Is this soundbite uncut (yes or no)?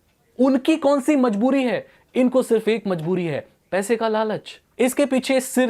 no